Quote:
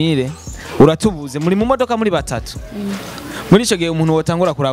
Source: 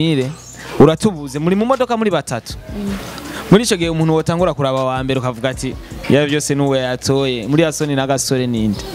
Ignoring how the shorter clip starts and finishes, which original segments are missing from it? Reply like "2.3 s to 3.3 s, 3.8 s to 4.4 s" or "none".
none